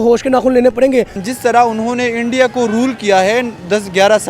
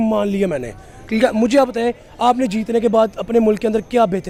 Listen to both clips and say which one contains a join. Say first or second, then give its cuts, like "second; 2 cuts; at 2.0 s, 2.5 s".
first; 1 cut; at 1.2 s